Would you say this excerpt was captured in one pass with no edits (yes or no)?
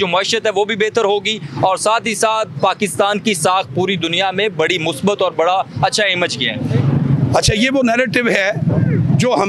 yes